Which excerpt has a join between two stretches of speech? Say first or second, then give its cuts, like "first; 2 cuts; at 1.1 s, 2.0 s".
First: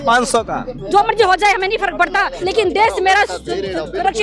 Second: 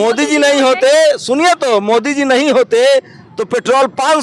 first; 1 cut; at 2.3 s